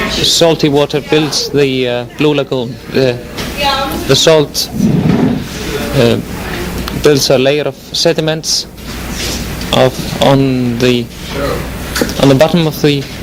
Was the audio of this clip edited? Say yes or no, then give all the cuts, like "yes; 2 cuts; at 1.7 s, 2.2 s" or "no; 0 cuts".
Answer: no; 0 cuts